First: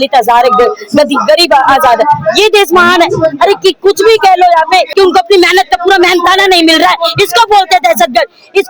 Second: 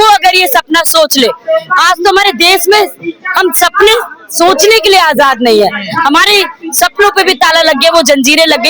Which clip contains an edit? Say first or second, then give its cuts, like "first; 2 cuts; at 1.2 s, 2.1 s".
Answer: first; 1 cut; at 4.9 s